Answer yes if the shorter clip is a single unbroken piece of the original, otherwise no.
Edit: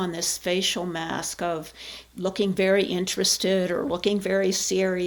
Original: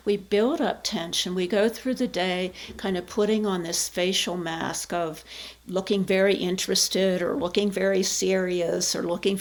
yes